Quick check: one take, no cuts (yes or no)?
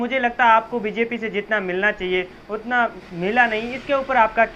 yes